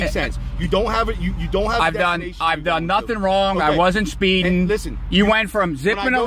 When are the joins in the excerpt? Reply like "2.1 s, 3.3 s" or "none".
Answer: none